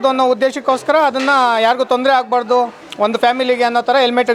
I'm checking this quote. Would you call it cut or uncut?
uncut